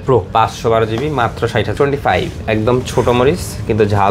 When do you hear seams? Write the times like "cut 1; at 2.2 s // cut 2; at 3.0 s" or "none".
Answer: cut 1; at 1.7 s